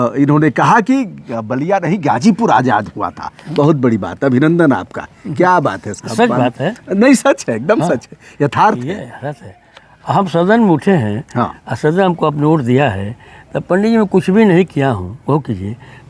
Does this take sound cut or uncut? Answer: uncut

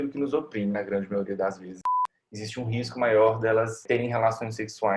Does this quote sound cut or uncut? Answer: cut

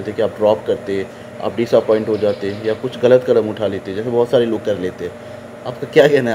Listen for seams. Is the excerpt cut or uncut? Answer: uncut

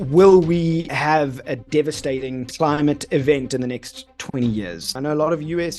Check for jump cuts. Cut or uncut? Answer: cut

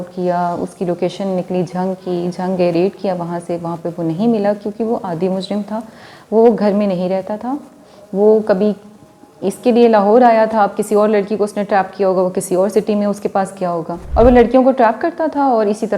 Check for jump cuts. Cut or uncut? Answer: uncut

